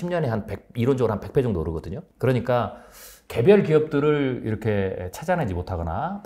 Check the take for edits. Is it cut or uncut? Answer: uncut